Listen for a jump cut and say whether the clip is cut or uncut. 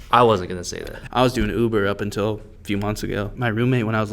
cut